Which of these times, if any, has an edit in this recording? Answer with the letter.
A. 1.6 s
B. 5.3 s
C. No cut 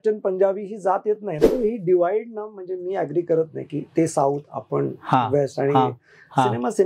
A